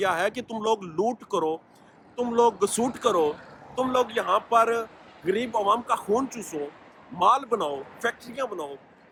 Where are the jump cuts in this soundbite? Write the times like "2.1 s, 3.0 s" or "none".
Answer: none